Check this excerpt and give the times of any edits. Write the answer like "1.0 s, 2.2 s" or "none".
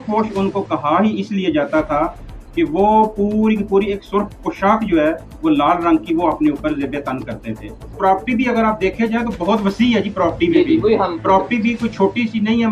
7.8 s

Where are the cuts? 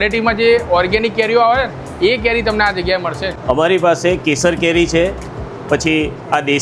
3.3 s

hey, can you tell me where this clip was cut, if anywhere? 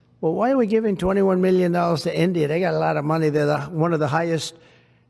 none

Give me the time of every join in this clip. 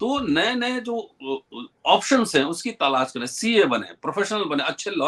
none

